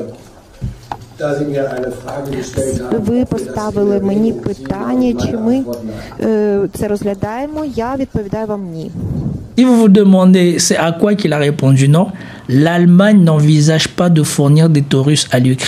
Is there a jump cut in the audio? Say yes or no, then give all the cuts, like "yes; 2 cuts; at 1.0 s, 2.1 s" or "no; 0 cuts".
yes; 1 cut; at 9.4 s